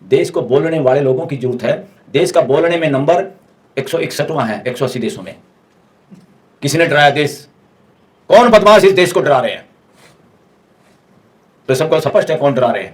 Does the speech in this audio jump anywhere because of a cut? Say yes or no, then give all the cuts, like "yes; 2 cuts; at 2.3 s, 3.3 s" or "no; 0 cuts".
no; 0 cuts